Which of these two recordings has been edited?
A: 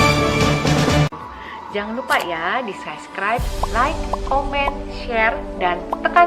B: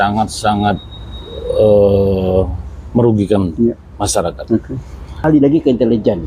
B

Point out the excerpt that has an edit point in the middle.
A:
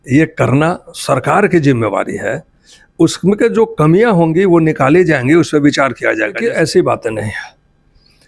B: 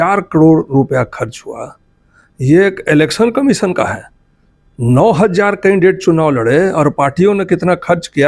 A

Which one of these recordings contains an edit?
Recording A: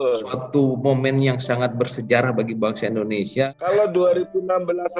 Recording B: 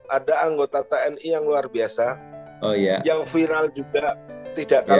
A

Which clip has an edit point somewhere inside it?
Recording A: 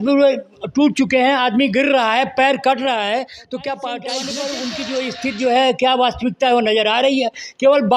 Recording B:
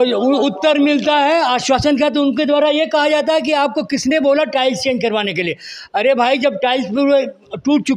A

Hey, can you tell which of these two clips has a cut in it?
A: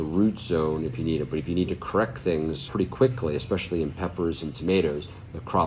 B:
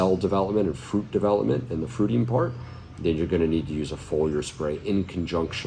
A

